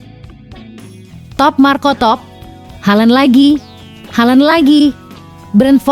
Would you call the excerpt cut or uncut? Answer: cut